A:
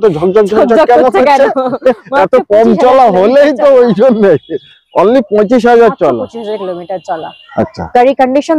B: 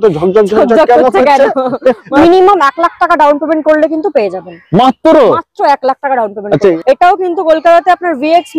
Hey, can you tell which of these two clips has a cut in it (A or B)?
B